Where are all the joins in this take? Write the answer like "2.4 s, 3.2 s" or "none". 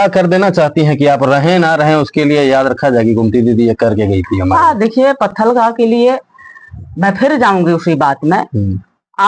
none